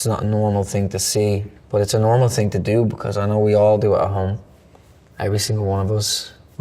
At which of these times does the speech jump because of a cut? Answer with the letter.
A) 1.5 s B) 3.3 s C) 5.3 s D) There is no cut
A